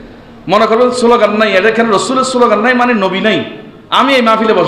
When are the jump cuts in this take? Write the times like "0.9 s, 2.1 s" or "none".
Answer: none